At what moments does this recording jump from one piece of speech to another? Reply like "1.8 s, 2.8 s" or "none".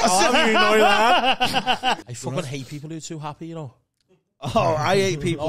2.1 s